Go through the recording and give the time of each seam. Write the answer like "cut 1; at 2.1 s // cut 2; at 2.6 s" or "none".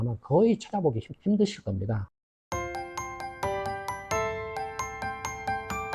cut 1; at 2.2 s